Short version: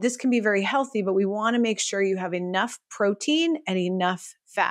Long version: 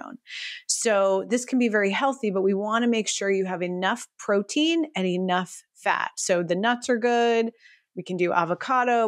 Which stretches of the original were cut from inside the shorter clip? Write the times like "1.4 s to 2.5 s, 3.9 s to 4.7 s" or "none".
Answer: none